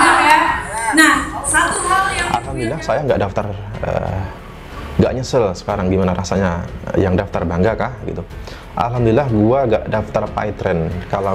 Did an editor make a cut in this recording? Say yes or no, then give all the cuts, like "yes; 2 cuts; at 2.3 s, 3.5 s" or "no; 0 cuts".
yes; 1 cut; at 2.2 s